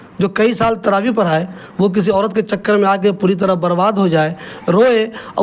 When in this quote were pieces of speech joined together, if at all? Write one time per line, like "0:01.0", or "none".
none